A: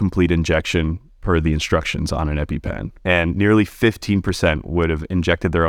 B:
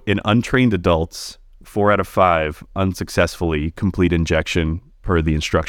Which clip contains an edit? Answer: A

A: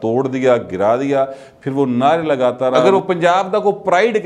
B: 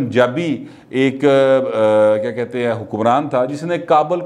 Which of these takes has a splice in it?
A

